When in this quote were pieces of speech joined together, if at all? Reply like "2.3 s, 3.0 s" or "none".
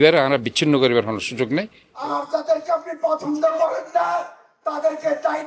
1.8 s